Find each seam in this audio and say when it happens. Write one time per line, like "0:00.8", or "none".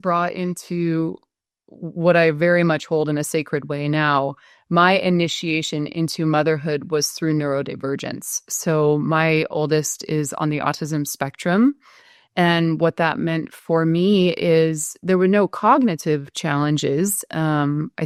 none